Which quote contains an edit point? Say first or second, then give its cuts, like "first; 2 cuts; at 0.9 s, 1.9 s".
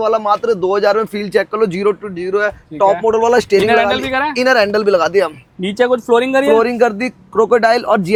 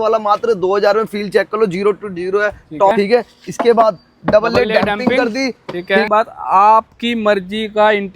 second; 2 cuts; at 2.9 s, 6.1 s